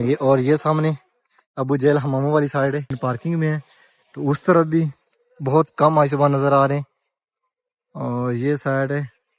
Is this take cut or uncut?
cut